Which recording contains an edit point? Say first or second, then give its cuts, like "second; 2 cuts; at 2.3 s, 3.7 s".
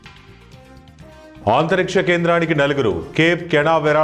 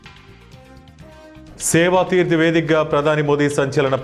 second; 1 cut; at 1.4 s